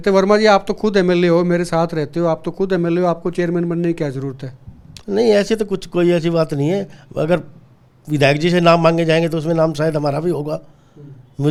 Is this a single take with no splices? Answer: yes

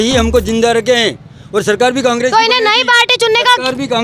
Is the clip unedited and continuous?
yes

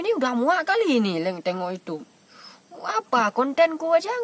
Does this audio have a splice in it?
no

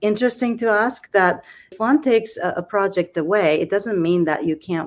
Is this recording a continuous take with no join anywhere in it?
no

